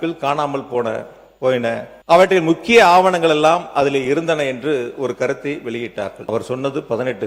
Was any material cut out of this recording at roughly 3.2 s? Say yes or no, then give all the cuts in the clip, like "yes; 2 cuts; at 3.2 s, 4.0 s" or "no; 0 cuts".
no; 2 cuts; at 1.9 s, 6.2 s